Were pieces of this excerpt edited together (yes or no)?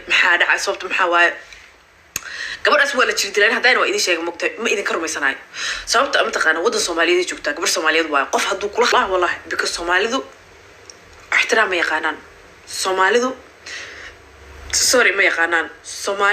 yes